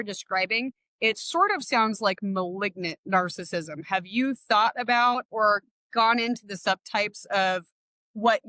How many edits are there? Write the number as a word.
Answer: zero